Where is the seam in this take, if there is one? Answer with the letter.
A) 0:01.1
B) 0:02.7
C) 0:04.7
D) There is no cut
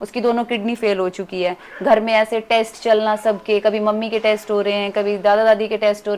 D